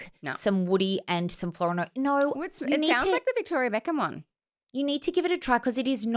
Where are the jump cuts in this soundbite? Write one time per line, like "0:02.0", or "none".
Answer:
none